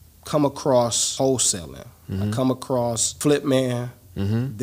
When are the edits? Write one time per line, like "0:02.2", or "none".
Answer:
0:01.0
0:03.1